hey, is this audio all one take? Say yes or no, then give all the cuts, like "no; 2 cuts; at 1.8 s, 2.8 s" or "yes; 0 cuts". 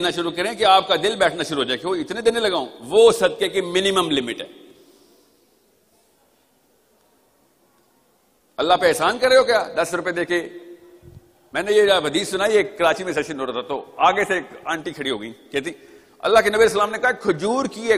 yes; 0 cuts